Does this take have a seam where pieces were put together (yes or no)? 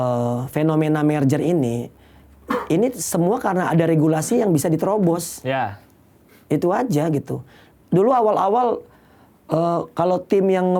no